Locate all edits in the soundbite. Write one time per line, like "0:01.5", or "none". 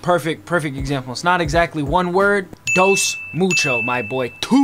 0:02.6